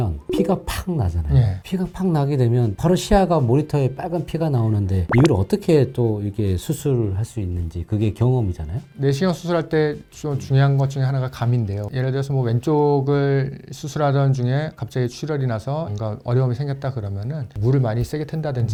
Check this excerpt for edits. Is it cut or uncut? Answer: uncut